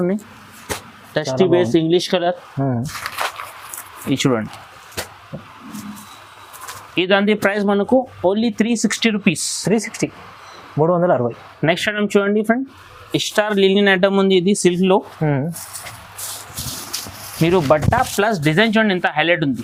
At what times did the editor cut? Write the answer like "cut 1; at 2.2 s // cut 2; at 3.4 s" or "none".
none